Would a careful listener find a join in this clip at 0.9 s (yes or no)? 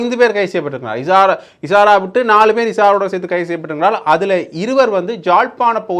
no